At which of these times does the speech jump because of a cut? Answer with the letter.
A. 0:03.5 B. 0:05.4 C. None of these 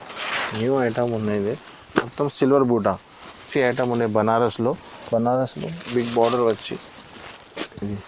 A